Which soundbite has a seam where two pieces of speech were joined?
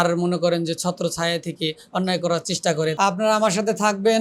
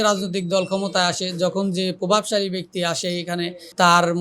first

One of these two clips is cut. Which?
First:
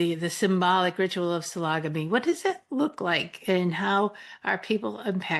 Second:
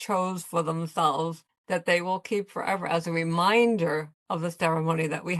second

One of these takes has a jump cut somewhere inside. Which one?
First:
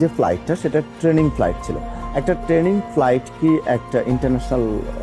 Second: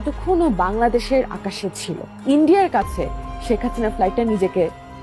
second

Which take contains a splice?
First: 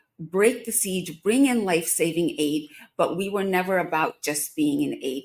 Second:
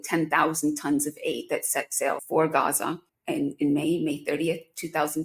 second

